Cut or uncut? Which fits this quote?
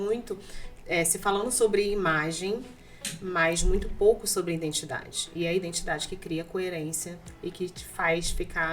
uncut